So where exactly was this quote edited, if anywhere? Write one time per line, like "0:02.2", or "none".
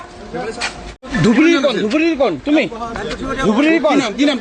0:01.0